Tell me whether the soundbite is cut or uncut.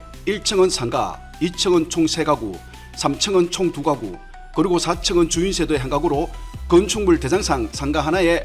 uncut